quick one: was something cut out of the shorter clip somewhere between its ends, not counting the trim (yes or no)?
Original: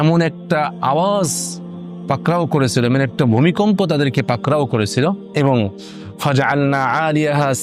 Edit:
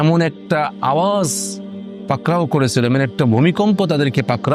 no